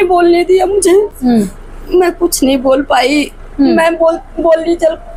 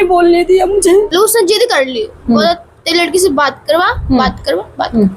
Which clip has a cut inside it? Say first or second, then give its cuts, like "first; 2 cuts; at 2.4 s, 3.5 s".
second; 1 cut; at 1.1 s